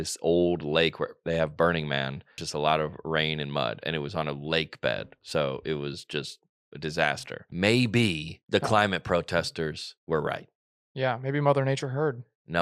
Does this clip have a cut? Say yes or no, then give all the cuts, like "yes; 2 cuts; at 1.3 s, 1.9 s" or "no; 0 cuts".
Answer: yes; 4 cuts; at 2.4 s, 7.4 s, 8.3 s, 9.9 s